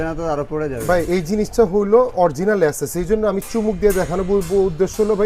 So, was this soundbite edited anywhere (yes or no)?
no